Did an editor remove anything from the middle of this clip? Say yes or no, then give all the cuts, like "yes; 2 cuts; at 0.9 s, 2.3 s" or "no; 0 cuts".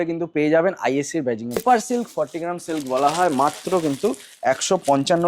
yes; 1 cut; at 1.6 s